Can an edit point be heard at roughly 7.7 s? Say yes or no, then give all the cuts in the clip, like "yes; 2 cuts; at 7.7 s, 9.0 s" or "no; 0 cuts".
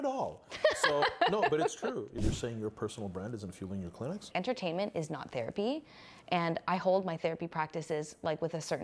no; 2 cuts; at 2.2 s, 4.3 s